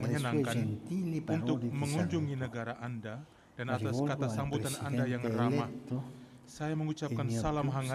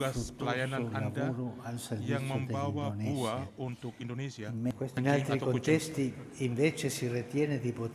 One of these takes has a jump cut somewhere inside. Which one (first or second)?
second